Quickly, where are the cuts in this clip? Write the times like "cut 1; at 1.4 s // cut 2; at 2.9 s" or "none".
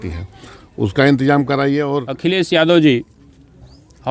cut 1; at 2.1 s